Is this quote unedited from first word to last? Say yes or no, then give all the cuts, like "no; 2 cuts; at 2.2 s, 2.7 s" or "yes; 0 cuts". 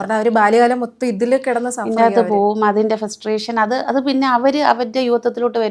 yes; 0 cuts